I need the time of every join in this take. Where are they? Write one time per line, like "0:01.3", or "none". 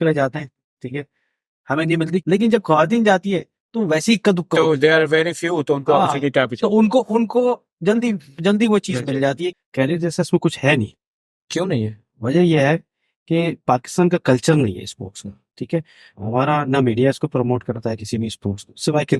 0:02.2
0:09.5

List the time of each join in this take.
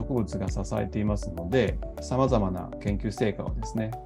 0:01.8
0:02.8

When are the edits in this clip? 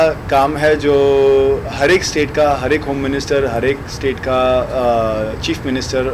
none

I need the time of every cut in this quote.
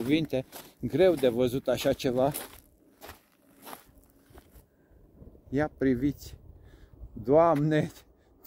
none

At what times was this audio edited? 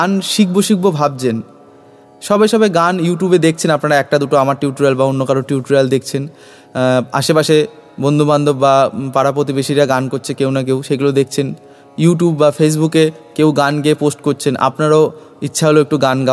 none

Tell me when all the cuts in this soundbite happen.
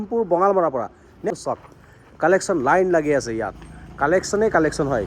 0:01.3

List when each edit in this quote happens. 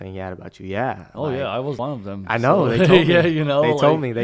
0:01.8

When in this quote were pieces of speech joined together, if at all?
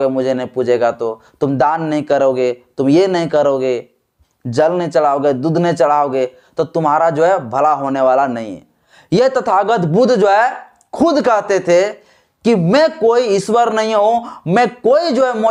none

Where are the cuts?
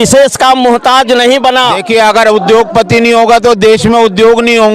0:01.8

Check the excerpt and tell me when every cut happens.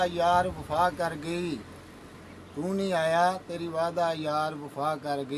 none

